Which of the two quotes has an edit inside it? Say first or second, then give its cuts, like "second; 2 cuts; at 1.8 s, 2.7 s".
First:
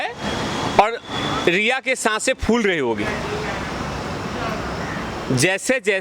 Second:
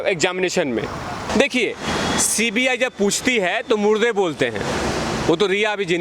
second; 1 cut; at 1.3 s